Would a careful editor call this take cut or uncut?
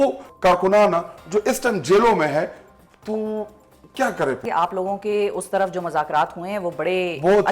cut